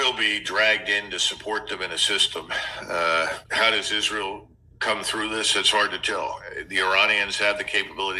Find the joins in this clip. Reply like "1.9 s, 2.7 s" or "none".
none